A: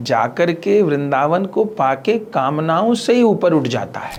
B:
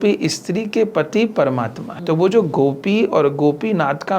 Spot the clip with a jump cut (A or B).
B